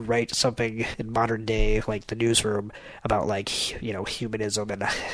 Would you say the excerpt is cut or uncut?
cut